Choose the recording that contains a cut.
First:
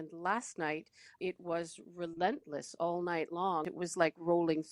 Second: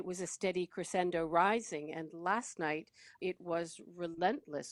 first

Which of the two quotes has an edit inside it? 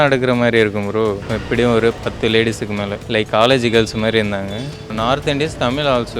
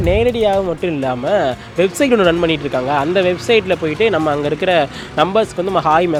first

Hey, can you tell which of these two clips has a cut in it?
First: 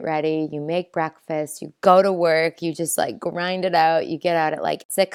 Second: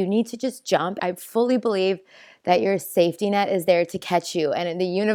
second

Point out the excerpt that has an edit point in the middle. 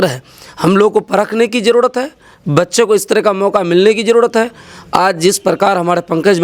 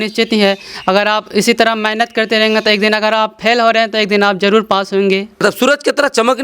second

